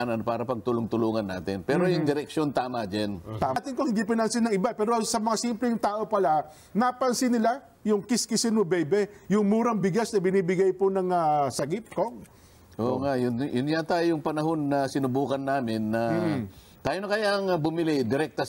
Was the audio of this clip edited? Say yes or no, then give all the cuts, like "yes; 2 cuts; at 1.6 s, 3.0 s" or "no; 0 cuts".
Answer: yes; 1 cut; at 3.6 s